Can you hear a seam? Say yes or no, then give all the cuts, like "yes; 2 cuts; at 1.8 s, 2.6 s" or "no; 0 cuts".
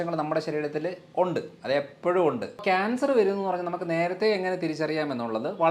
yes; 1 cut; at 2.6 s